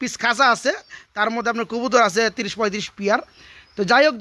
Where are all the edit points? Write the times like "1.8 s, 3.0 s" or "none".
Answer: none